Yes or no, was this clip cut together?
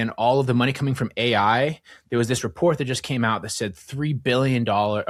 no